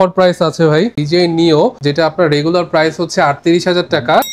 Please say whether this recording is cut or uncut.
cut